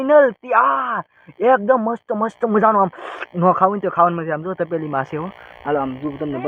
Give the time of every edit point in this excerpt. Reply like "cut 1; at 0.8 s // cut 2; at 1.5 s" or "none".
none